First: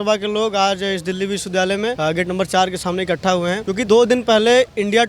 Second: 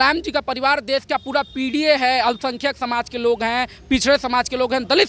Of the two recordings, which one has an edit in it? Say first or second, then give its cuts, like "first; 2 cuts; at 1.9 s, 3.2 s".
first; 2 cuts; at 2.0 s, 3.8 s